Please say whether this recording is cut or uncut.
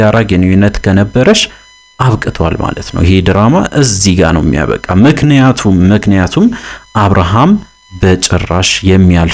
uncut